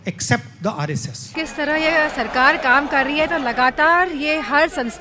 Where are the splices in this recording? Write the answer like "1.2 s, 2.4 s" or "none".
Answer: 1.4 s